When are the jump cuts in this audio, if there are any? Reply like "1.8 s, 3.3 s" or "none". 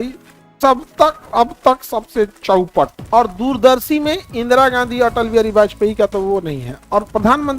3.0 s